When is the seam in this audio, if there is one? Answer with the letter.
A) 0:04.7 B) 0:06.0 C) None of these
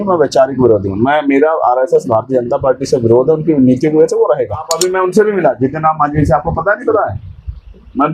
A